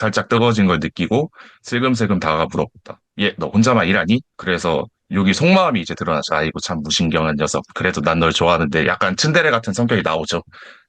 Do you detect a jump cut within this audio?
yes; 1 cut; at 4.3 s

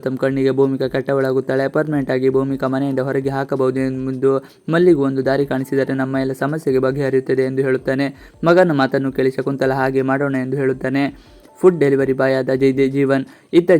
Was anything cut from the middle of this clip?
no; 0 cuts

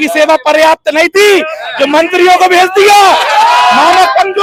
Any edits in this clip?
no; 0 cuts

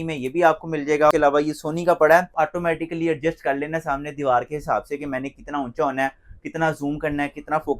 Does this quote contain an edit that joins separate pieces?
yes; 2 cuts; at 1.1 s, 2.3 s

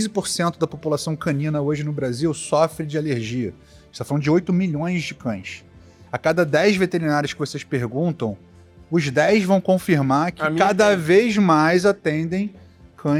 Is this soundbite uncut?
yes; 0 cuts

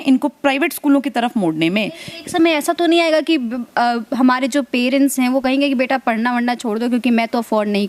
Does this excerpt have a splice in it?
no; 0 cuts

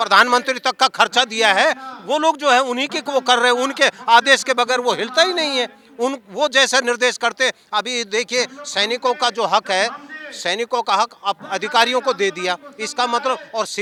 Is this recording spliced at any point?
no; 0 cuts

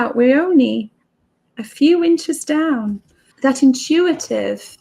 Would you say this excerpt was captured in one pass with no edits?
no; 1 cut; at 3.2 s

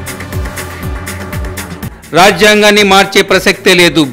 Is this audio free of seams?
yes; 0 cuts

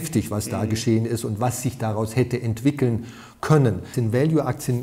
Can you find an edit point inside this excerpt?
yes; 1 cut; at 3.9 s

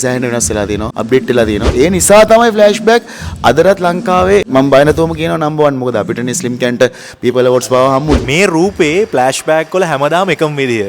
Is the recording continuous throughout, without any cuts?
no; 4 cuts; at 0.9 s, 1.7 s, 4.5 s, 8.2 s

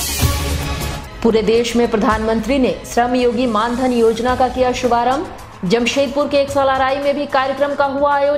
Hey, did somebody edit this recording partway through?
no; 0 cuts

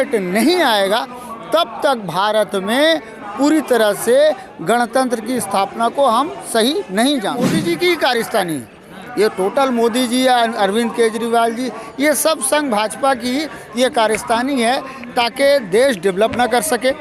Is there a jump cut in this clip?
yes; 1 cut; at 7.5 s

